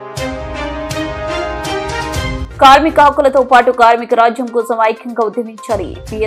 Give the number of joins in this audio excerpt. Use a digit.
1